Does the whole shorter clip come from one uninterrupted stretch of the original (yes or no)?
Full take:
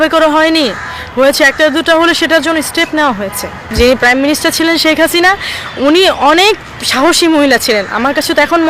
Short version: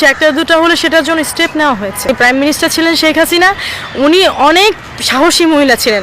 no